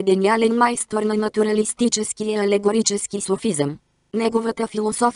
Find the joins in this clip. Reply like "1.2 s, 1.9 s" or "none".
3.5 s

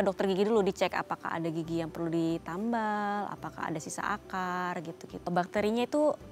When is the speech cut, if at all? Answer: 5.3 s

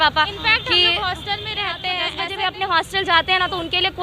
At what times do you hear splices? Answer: 2.1 s

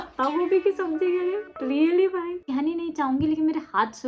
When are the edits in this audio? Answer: 2.3 s

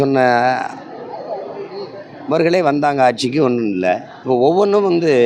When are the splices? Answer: 4.1 s

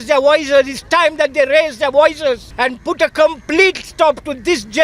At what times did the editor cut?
2.5 s

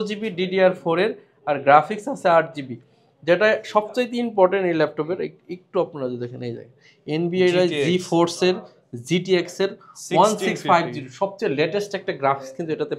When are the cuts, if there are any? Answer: none

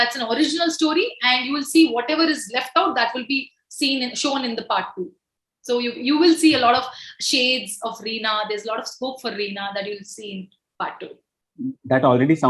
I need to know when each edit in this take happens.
none

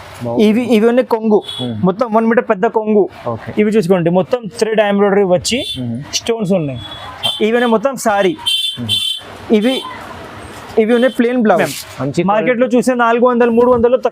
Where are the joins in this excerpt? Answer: 11.6 s

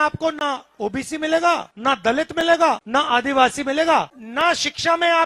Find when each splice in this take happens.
1.7 s, 2.8 s, 4.2 s

